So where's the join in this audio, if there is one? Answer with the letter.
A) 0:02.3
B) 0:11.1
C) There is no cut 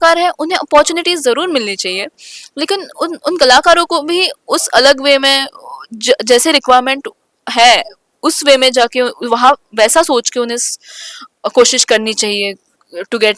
C